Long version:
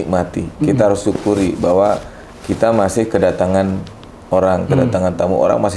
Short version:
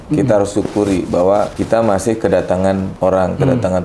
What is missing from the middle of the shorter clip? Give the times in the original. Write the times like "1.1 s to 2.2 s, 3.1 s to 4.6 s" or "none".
2.1 s to 2.5 s, 3.8 s to 4.2 s